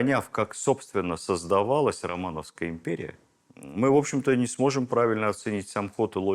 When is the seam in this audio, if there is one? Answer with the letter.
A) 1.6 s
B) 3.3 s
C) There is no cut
B